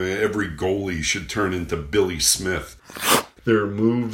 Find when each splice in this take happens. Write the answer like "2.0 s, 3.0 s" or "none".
3.0 s